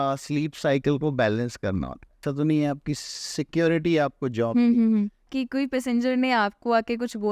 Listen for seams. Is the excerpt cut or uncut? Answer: cut